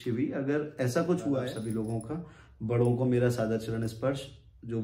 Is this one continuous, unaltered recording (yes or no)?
no